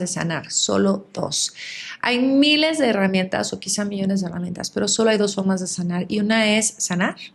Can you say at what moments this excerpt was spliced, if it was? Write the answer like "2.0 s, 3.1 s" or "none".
none